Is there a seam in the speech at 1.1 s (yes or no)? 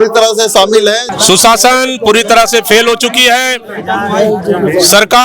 yes